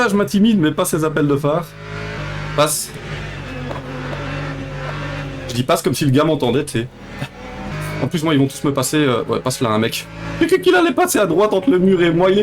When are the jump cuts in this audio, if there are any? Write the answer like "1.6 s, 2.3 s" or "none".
2.2 s, 7.7 s

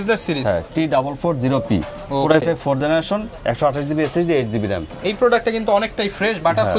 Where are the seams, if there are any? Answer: none

